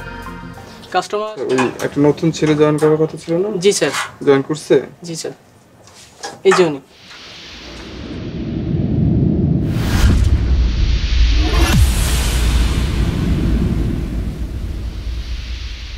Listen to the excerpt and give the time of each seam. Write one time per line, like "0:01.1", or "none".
0:01.2